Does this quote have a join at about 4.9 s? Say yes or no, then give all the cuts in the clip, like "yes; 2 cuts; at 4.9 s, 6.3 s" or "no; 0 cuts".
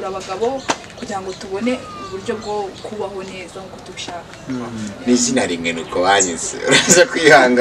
yes; 1 cut; at 4.9 s